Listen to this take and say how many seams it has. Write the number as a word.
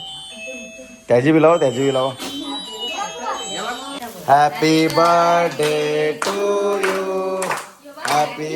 one